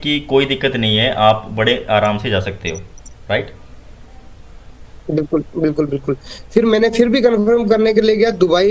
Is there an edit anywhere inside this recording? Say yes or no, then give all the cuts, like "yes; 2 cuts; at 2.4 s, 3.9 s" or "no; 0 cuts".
no; 0 cuts